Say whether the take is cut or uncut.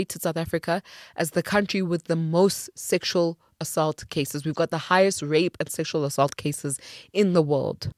uncut